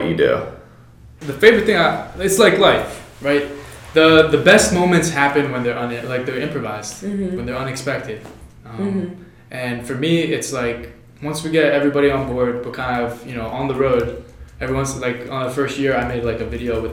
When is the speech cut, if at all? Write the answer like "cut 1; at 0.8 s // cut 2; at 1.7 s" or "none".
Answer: cut 1; at 1.2 s